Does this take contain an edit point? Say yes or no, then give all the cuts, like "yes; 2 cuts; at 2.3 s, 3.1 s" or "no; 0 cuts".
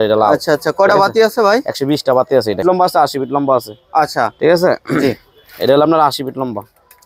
yes; 1 cut; at 2.6 s